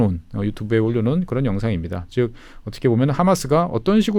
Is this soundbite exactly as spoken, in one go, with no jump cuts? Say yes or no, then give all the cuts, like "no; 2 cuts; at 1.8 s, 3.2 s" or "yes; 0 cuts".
yes; 0 cuts